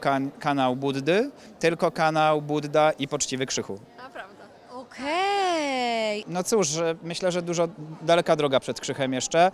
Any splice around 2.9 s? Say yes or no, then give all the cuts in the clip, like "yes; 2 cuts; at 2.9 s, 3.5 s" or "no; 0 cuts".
no; 1 cut; at 6.2 s